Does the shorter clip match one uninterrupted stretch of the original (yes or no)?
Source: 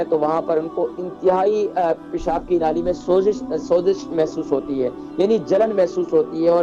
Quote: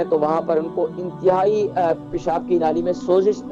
yes